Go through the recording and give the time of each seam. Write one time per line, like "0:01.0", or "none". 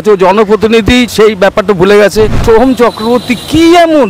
0:01.1
0:02.4